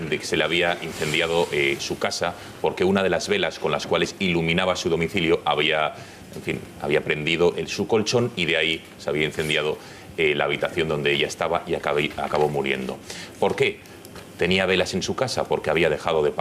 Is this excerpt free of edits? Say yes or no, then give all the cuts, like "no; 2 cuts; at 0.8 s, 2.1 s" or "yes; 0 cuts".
no; 1 cut; at 11.6 s